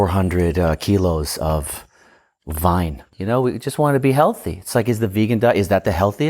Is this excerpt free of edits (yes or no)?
no